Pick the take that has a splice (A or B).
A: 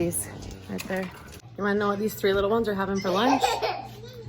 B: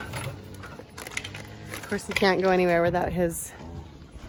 A